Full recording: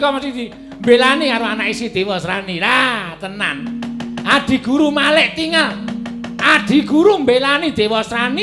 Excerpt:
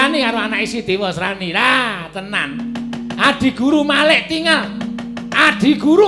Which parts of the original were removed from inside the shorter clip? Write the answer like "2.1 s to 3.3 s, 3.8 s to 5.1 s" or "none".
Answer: none